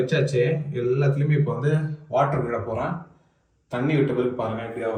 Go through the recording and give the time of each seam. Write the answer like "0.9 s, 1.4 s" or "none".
none